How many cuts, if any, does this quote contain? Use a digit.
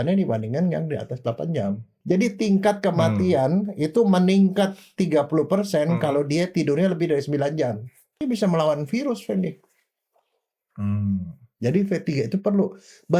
2